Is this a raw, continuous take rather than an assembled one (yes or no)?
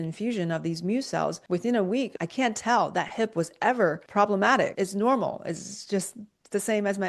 no